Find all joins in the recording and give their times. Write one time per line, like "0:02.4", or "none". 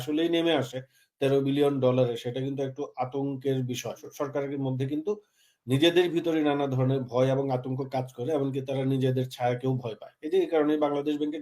0:04.1